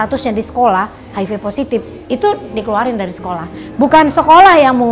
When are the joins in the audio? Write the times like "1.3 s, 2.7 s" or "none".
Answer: none